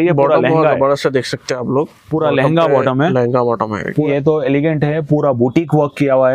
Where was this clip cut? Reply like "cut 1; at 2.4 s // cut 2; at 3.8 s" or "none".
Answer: cut 1; at 4.1 s